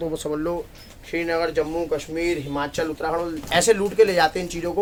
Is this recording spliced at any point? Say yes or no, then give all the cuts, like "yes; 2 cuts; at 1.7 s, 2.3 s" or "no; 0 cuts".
no; 0 cuts